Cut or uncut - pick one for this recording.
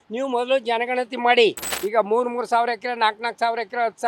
cut